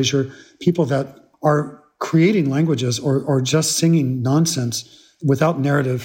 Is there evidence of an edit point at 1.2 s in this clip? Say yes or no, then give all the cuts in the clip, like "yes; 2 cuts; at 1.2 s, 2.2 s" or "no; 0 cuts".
yes; 1 cut; at 1.2 s